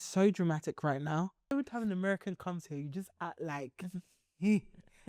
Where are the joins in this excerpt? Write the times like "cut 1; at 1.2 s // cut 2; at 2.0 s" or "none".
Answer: cut 1; at 1.5 s